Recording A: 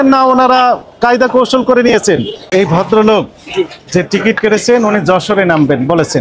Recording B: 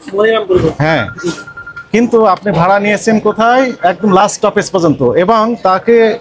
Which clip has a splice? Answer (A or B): A